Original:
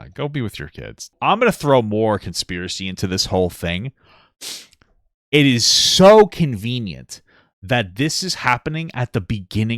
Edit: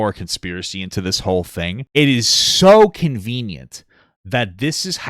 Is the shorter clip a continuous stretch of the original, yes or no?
no